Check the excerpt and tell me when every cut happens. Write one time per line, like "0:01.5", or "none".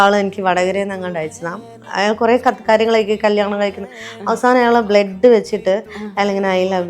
0:01.7